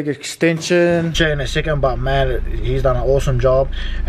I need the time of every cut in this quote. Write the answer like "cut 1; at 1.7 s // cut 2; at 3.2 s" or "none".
cut 1; at 1.1 s